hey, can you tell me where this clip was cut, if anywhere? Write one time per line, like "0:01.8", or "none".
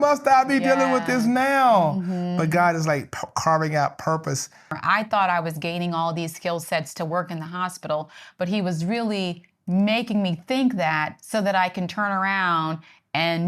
0:04.7